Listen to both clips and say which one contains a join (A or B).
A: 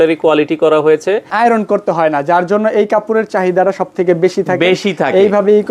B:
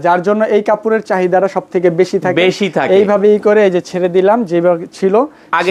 A